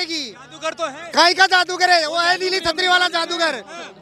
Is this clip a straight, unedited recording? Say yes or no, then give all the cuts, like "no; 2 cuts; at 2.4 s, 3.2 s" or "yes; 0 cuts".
yes; 0 cuts